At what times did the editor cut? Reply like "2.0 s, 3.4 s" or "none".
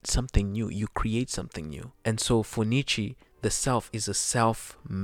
1.9 s